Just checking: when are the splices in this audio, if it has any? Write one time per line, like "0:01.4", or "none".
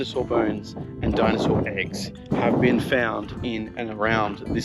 none